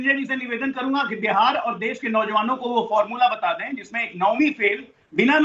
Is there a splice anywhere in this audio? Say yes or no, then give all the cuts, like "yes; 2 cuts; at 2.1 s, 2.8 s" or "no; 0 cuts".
no; 0 cuts